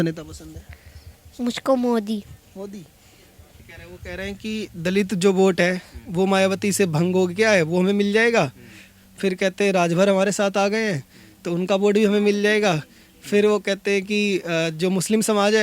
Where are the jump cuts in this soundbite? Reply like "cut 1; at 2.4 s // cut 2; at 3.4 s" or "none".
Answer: cut 1; at 3.6 s